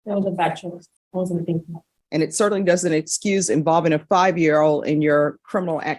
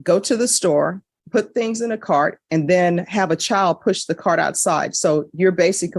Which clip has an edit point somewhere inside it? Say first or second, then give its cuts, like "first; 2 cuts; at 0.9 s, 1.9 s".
first; 2 cuts; at 0.9 s, 1.9 s